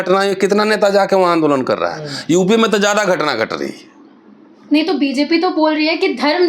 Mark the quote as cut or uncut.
uncut